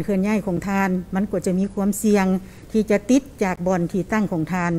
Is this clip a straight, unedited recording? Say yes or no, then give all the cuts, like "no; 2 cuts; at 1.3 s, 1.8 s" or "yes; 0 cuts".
yes; 0 cuts